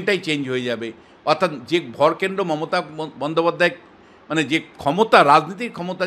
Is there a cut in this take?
no; 0 cuts

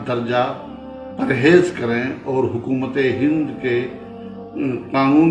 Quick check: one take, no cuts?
yes; 0 cuts

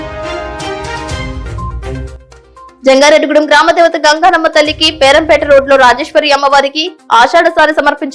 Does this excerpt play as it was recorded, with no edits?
no; 1 cut; at 1.0 s

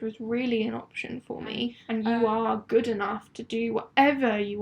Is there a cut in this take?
yes; 1 cut; at 1.8 s

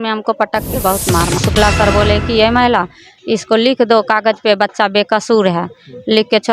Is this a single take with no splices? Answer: no; 1 cut; at 1.5 s

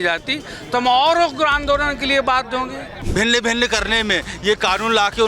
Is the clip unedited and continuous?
no; 1 cut; at 3.0 s

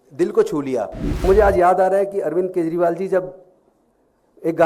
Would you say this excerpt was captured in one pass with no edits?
no; 1 cut; at 1.2 s

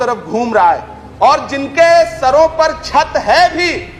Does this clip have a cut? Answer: no; 0 cuts

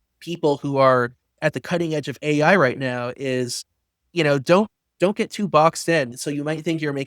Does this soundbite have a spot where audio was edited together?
yes; 1 cut; at 6.1 s

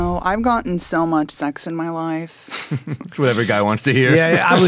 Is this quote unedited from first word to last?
yes; 0 cuts

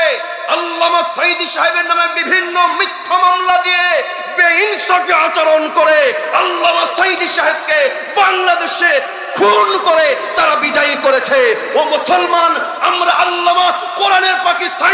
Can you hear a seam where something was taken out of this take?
no; 0 cuts

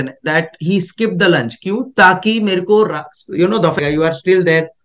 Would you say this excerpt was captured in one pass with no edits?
no; 1 cut; at 3.8 s

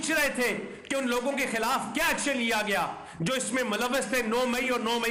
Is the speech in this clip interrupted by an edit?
no; 0 cuts

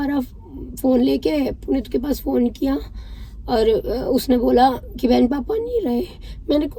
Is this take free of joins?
yes; 0 cuts

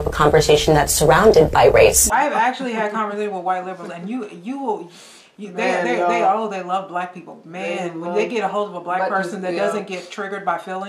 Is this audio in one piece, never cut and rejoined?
no; 1 cut; at 2.0 s

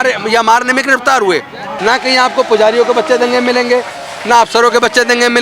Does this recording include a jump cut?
yes; 1 cut; at 1.6 s

